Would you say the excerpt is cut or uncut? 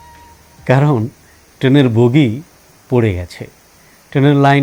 uncut